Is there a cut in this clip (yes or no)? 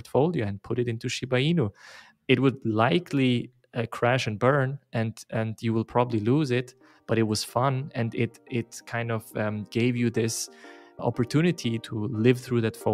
yes